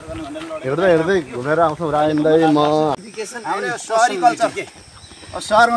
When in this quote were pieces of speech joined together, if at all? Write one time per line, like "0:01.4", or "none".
0:03.0